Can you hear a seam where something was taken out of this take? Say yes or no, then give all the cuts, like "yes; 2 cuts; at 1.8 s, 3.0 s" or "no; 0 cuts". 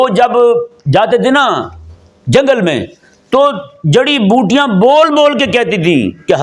no; 0 cuts